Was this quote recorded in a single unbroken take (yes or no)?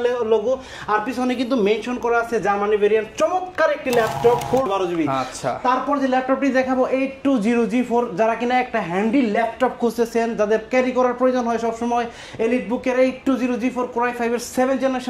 no